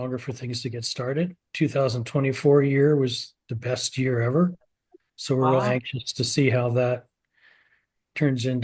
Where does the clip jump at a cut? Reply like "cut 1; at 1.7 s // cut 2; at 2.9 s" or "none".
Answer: cut 1; at 1.4 s